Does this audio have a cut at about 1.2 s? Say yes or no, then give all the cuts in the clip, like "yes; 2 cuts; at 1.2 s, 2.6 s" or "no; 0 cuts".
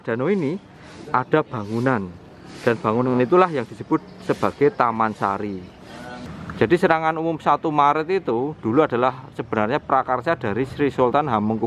no; 1 cut; at 6.2 s